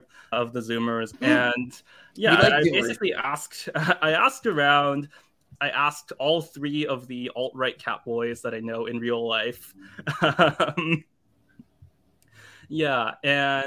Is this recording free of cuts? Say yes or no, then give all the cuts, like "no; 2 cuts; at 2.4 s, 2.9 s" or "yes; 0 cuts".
no; 2 cuts; at 1.1 s, 5.5 s